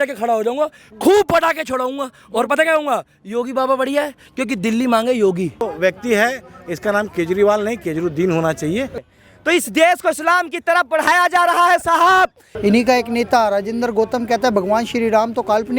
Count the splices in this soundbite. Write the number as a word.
three